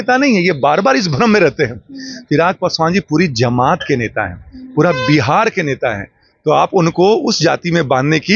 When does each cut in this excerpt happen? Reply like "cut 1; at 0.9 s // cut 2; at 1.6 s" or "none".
none